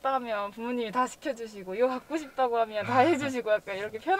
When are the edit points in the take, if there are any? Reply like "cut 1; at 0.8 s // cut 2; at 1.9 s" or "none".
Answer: none